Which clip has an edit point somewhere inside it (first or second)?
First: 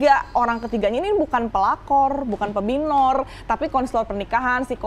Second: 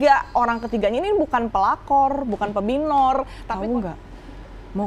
second